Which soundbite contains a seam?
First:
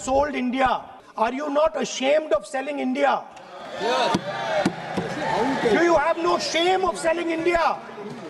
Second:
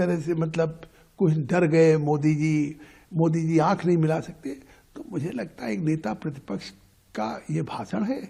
first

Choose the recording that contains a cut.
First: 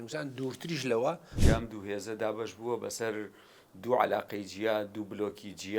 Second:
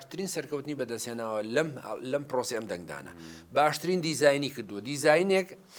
first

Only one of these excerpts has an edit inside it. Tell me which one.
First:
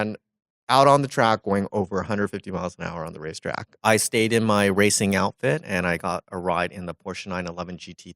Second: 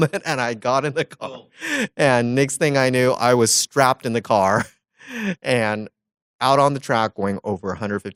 first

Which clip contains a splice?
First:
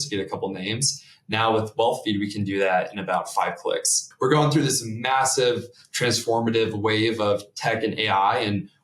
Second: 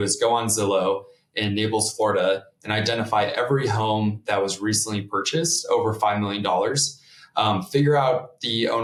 first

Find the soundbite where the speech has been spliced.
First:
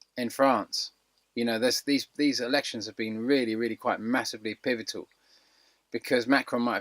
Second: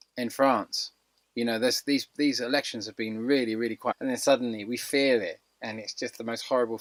first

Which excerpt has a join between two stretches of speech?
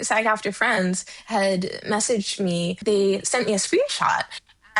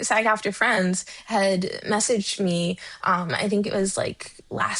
first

